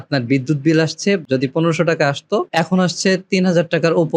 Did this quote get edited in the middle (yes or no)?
yes